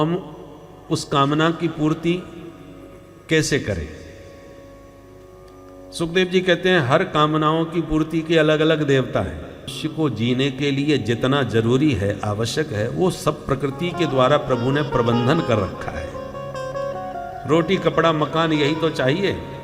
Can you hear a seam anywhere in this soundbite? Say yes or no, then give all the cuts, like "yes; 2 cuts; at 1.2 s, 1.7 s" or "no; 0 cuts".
yes; 1 cut; at 9.7 s